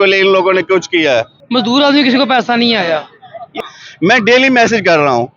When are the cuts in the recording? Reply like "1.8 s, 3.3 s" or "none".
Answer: 1.4 s, 3.6 s